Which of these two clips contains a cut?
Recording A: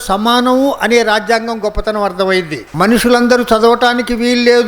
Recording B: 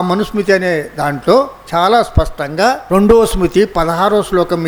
A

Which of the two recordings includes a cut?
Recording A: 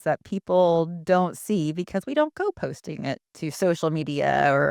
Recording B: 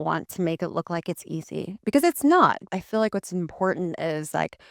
B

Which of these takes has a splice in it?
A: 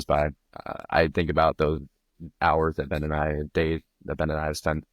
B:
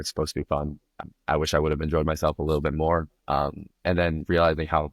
B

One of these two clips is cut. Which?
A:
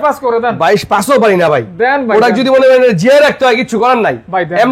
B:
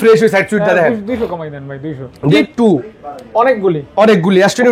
B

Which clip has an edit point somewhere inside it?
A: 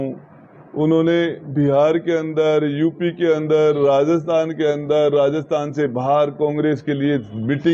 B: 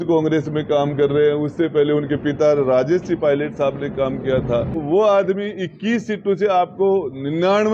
B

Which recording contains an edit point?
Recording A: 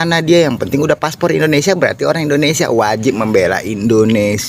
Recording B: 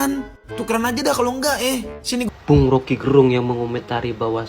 B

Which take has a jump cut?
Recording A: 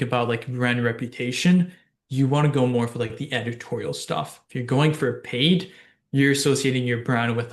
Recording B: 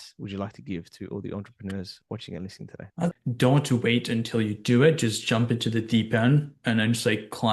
B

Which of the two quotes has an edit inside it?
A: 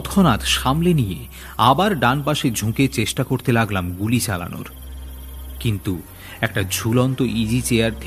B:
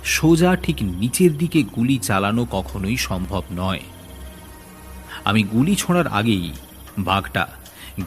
B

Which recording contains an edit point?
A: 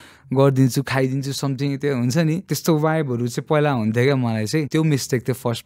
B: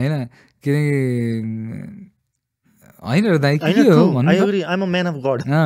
A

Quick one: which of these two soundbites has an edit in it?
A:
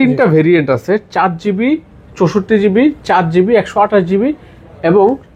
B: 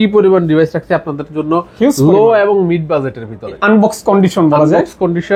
B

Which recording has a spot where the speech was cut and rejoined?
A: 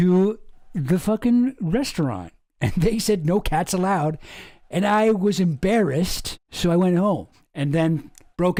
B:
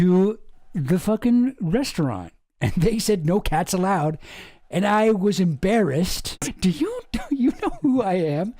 B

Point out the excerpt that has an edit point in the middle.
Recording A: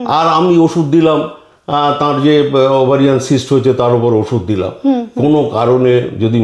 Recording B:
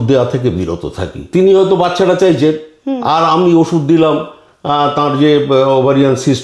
B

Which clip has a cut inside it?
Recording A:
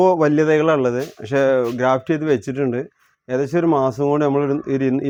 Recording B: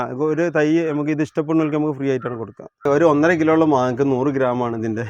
B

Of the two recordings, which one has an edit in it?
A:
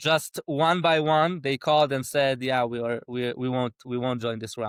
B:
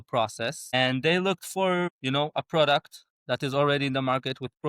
B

